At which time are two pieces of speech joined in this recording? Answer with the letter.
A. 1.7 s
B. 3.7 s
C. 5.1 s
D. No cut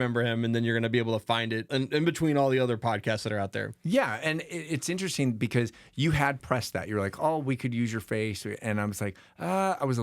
A